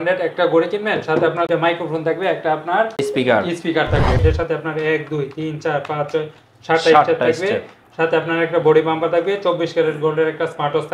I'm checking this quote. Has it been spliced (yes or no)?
yes